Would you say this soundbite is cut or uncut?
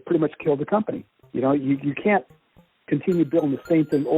cut